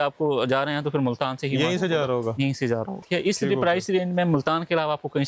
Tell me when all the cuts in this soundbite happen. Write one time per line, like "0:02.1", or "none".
0:01.2
0:03.0